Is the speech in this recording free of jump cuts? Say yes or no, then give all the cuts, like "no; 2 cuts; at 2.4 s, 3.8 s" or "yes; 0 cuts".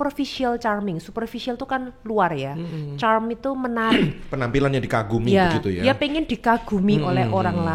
yes; 0 cuts